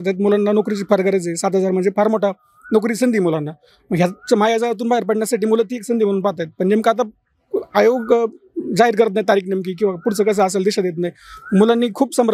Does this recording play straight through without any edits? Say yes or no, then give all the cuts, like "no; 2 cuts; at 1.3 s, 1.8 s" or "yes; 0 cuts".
yes; 0 cuts